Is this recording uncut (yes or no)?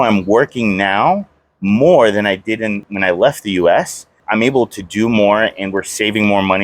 no